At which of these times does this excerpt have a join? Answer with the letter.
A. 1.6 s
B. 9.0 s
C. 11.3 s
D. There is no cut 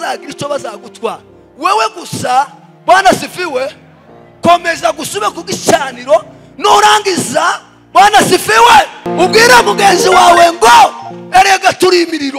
B